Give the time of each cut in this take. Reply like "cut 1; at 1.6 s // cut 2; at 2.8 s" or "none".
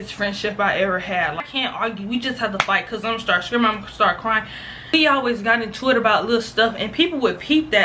cut 1; at 1.4 s // cut 2; at 4.9 s